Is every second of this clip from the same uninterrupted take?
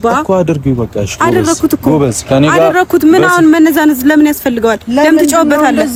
yes; 0 cuts

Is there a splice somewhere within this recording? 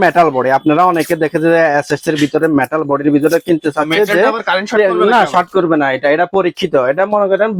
no; 0 cuts

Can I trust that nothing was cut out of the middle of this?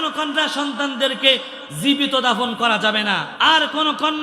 no; 1 cut; at 3.3 s

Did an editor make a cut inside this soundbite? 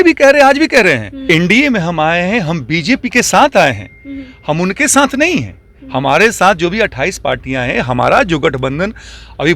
yes; 1 cut; at 1.3 s

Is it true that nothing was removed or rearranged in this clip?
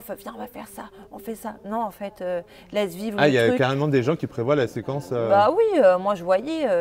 yes; 0 cuts

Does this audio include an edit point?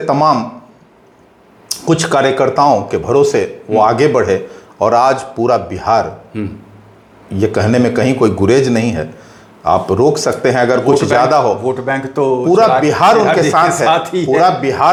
no; 0 cuts

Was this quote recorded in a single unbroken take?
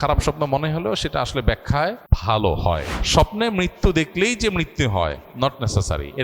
no; 2 cuts; at 2.1 s, 2.9 s

